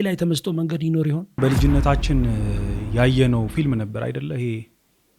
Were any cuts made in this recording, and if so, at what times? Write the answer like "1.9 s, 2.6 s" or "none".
1.4 s